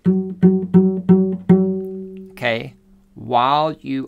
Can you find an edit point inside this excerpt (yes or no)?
no